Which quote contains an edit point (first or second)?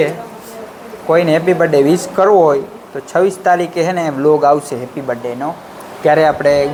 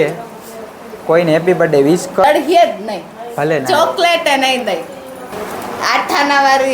second